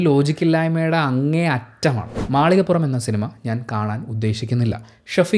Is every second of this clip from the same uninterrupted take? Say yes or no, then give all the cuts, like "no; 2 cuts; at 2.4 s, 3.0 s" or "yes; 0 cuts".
no; 1 cut; at 2.1 s